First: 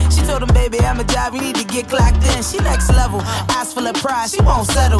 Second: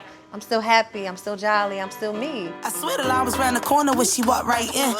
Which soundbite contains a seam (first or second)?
second